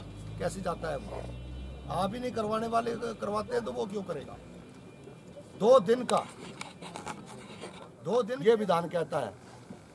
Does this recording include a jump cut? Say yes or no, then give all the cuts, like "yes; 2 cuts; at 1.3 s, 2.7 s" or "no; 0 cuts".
yes; 1 cut; at 8.3 s